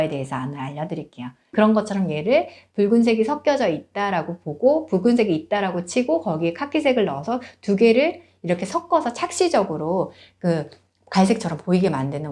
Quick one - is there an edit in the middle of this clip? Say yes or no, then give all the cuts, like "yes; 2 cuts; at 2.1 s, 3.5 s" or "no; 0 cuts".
yes; 1 cut; at 1.4 s